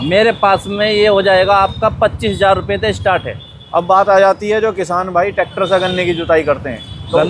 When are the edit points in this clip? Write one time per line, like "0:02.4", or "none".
none